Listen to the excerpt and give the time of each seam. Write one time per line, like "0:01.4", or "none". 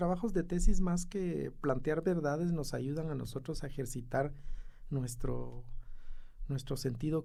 none